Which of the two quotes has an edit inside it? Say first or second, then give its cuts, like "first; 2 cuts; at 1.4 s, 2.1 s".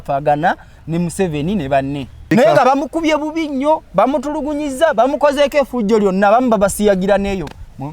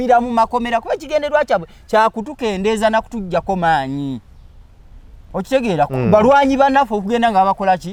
first; 1 cut; at 2.3 s